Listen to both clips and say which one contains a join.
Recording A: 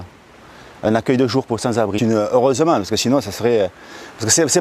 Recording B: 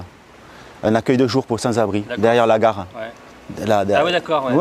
B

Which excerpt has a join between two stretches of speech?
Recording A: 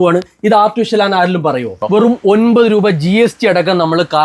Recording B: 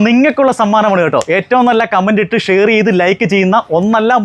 A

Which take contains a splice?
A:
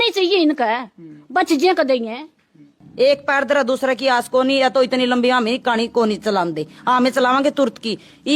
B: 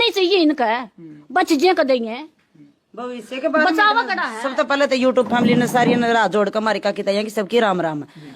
A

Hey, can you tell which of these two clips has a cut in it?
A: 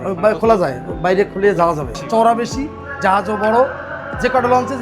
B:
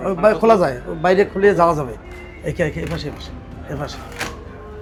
A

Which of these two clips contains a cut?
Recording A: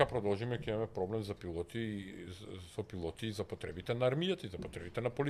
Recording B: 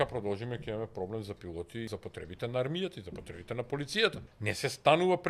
B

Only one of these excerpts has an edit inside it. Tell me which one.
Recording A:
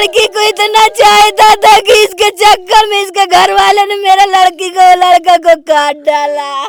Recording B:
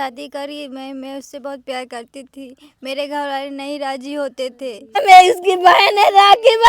B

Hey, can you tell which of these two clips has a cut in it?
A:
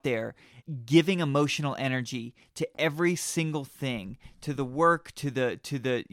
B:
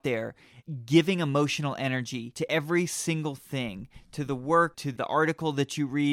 B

